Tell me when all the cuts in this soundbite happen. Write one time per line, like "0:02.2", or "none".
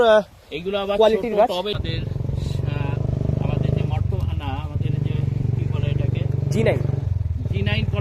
0:01.8